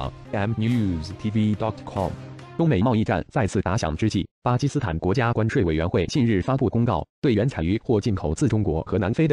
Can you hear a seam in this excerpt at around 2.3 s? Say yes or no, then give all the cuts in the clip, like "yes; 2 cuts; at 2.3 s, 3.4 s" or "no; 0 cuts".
yes; 1 cut; at 2.3 s